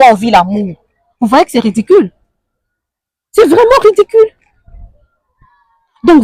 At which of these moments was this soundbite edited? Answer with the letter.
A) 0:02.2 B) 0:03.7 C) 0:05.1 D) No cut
D